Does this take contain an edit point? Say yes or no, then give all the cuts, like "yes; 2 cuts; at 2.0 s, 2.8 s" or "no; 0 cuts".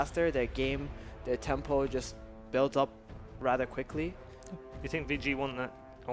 yes; 1 cut; at 3.6 s